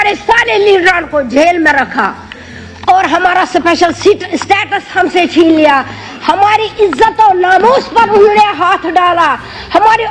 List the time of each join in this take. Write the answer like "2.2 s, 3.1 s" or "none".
none